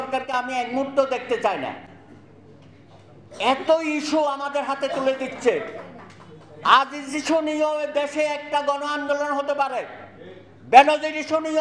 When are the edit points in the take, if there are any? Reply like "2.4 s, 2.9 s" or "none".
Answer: none